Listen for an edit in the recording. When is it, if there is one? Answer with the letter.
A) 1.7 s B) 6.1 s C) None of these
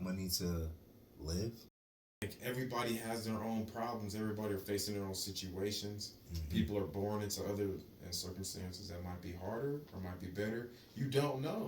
A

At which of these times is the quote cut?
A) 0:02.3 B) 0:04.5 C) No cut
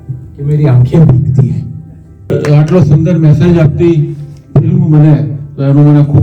A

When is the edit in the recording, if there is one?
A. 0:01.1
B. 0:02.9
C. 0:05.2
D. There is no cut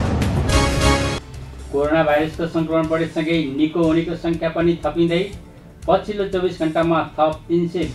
A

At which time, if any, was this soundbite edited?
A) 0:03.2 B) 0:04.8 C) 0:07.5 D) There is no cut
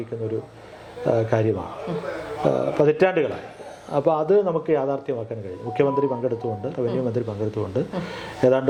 D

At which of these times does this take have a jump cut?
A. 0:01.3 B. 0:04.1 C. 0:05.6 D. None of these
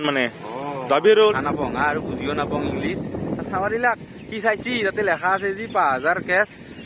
A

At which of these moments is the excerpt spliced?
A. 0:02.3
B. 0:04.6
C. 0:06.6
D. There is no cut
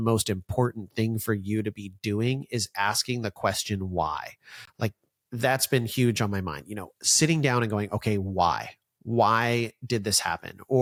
D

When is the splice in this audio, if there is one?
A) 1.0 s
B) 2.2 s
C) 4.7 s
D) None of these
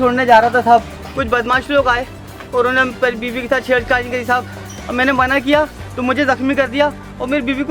D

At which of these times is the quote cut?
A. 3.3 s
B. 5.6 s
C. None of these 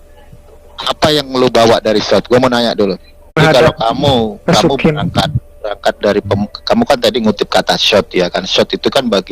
A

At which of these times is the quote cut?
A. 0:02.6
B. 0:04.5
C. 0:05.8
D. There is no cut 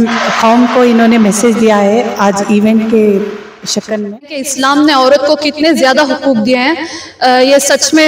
B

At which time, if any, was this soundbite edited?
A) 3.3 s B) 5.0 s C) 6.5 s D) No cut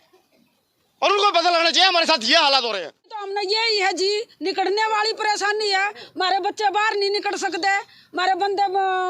A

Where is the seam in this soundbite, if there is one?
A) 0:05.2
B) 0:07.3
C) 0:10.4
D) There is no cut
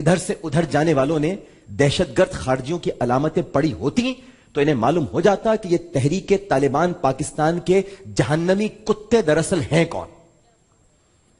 D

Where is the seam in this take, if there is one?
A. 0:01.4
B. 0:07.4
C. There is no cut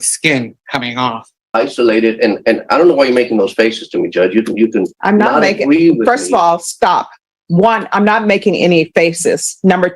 A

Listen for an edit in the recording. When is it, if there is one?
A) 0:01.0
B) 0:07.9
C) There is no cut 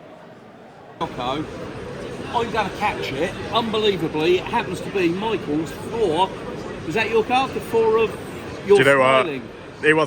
A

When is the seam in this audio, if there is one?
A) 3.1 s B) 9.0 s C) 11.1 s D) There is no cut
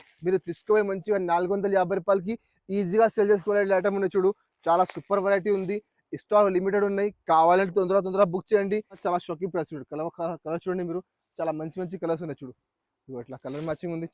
B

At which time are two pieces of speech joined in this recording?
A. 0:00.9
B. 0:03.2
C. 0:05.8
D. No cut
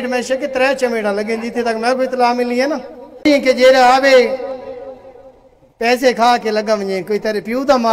B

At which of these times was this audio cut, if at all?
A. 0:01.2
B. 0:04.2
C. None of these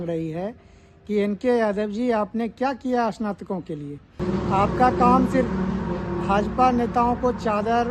B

